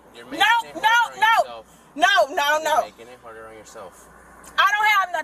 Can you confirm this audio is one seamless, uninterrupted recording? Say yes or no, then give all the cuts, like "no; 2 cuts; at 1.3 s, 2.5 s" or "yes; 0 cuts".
yes; 0 cuts